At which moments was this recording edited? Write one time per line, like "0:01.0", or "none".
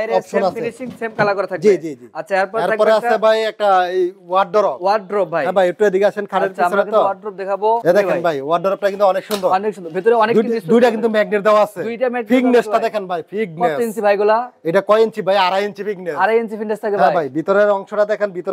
none